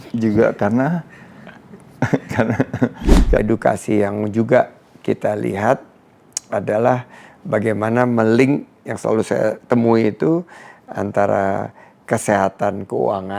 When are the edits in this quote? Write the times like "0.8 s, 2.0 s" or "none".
3.4 s